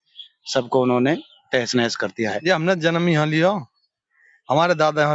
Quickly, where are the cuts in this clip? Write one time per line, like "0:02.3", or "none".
0:02.4